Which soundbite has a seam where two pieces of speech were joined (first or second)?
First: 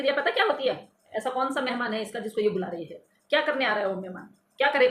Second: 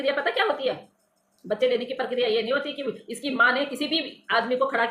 first